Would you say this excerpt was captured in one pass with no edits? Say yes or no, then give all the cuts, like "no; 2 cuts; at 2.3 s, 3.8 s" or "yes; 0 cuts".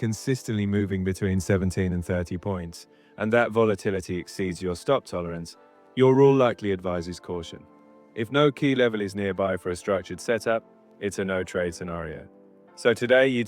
yes; 0 cuts